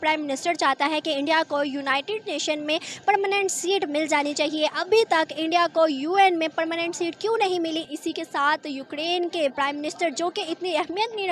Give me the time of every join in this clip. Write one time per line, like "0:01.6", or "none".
none